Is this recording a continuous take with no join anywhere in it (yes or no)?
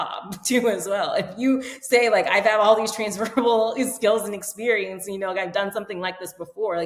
yes